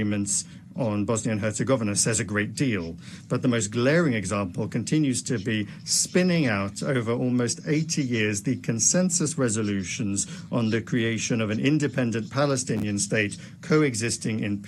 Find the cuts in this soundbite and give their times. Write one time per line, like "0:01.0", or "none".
none